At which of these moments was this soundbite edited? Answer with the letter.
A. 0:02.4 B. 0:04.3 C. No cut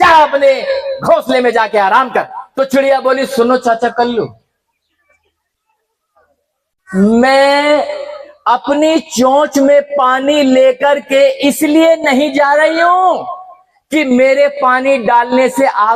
A